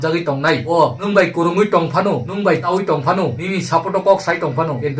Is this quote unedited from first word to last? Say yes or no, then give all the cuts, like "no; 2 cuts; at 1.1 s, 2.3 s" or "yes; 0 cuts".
no; 2 cuts; at 1.0 s, 2.6 s